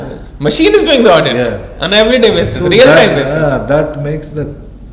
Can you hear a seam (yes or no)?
no